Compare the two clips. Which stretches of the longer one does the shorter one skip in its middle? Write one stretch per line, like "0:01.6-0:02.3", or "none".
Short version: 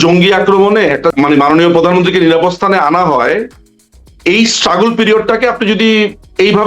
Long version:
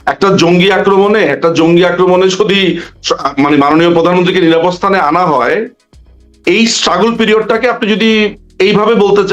0:01.5-0:03.3